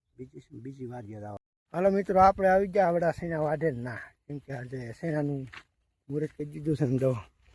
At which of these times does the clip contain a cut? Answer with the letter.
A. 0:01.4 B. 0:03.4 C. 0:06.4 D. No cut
A